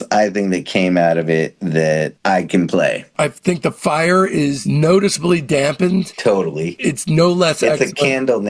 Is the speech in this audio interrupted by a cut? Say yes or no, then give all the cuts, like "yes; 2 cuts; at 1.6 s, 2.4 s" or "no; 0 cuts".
yes; 2 cuts; at 3.0 s, 4.6 s